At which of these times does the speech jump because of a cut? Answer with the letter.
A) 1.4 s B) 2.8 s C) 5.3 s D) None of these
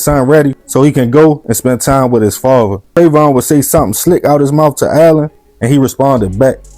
B